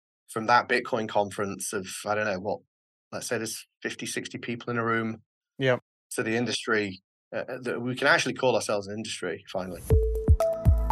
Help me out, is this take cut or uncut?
cut